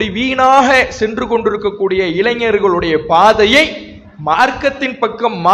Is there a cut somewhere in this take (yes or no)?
no